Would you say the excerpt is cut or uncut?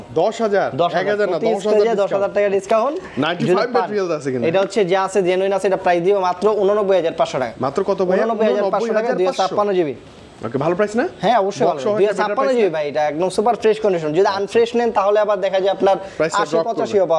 uncut